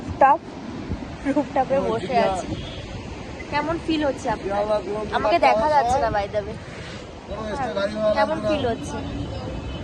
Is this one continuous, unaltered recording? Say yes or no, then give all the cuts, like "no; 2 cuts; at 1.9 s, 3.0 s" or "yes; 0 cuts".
yes; 0 cuts